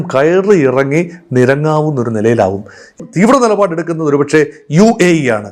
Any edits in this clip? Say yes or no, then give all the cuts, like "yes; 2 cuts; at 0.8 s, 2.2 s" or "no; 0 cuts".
yes; 1 cut; at 3.0 s